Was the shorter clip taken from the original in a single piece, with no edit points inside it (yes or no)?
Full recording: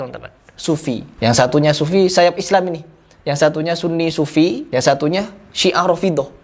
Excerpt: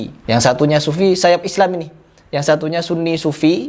yes